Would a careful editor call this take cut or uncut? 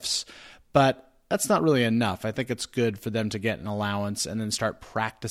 uncut